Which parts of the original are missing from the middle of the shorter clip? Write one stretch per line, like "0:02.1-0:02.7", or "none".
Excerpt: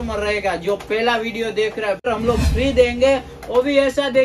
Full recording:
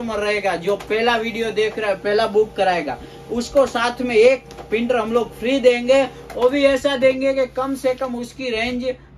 0:02.0-0:04.9